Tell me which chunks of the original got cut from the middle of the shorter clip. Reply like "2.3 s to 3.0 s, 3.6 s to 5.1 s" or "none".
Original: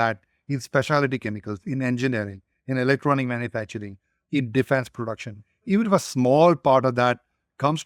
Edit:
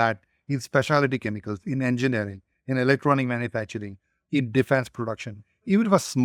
none

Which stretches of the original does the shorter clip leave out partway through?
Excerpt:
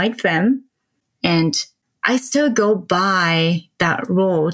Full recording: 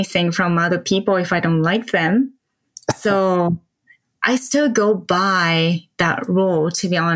3.0 s to 3.5 s

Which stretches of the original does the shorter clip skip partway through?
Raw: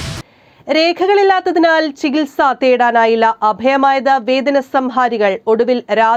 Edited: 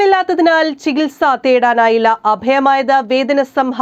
none

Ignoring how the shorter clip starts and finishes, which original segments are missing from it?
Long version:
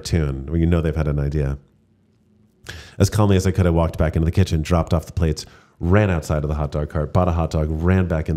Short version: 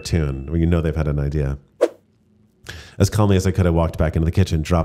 none

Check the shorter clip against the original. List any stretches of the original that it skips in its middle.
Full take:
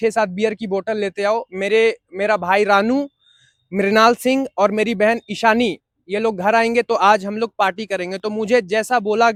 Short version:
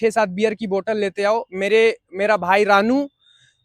none

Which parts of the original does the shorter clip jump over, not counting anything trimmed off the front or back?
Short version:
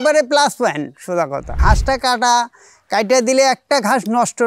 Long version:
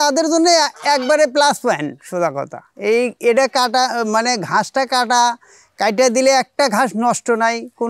2.6 s to 4.4 s

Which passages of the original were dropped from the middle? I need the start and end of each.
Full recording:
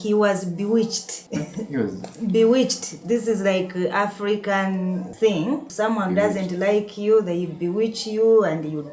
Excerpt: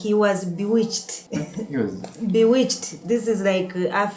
none

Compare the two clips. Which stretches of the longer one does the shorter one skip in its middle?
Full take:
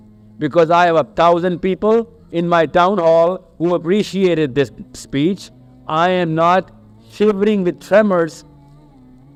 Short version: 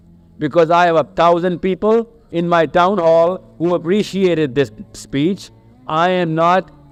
none

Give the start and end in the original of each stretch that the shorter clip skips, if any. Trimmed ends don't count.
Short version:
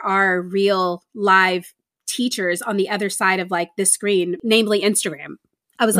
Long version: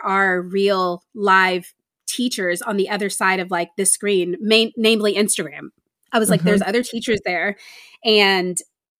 4.4 s to 4.7 s

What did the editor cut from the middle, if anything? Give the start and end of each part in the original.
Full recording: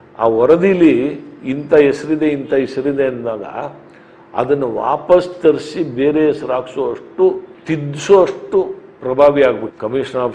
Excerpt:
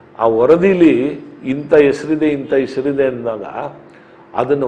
none

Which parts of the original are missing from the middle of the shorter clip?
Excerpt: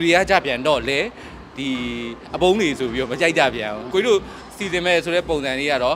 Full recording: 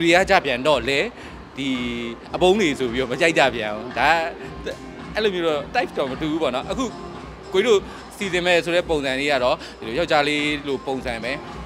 3.8 s to 7.4 s

